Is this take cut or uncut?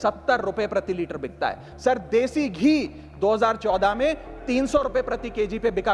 uncut